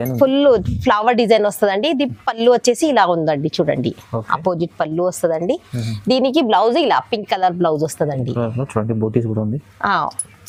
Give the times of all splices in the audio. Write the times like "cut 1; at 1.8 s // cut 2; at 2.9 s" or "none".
none

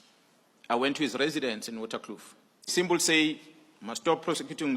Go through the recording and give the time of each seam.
cut 1; at 2.7 s

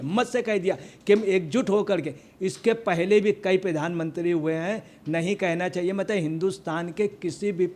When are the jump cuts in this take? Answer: none

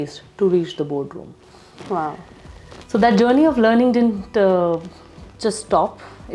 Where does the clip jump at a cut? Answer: none

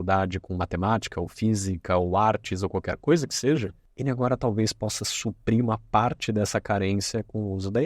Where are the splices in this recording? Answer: cut 1; at 3.8 s

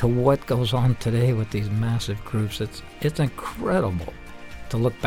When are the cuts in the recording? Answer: none

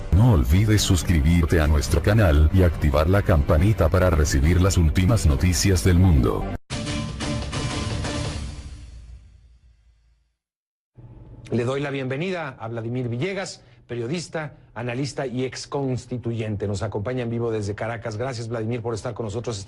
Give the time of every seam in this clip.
cut 1; at 6.4 s

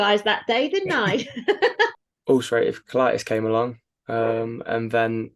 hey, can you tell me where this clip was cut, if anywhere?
cut 1; at 1.9 s

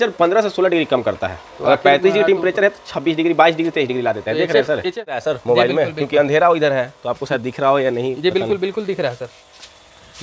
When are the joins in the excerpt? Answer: cut 1; at 5.1 s

